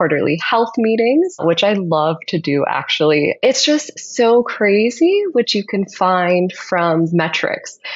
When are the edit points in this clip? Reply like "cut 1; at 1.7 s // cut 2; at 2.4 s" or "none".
none